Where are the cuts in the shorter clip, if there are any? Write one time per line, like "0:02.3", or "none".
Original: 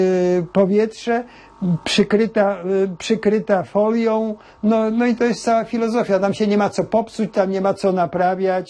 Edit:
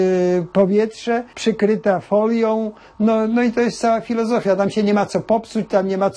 0:01.3